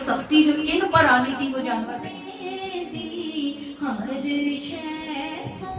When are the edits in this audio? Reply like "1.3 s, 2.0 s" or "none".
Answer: 1.9 s